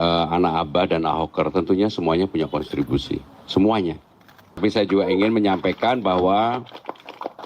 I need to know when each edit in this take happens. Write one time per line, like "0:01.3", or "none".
0:04.6